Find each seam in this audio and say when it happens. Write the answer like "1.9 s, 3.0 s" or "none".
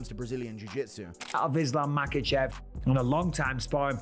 1.3 s